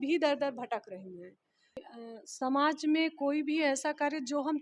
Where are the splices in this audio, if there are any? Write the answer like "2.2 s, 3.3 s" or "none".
1.9 s